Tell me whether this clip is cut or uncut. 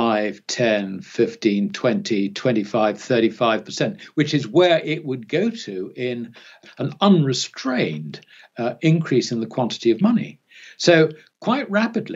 cut